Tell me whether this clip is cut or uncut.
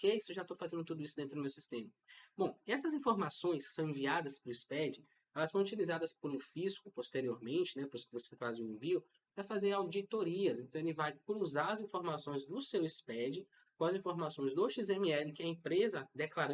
uncut